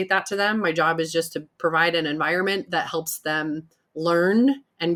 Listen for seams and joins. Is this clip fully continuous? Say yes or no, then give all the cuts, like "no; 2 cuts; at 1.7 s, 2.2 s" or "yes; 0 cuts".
yes; 0 cuts